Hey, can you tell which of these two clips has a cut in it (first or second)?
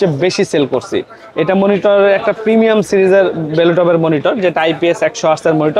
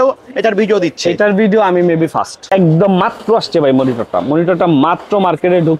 second